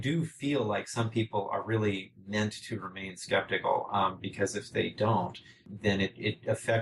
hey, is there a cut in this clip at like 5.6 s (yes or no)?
yes